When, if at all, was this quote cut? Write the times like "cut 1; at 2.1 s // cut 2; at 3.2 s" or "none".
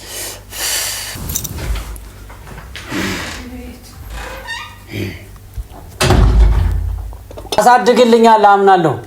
cut 1; at 1.2 s // cut 2; at 7.6 s